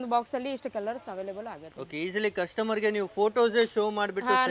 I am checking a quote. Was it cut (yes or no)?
no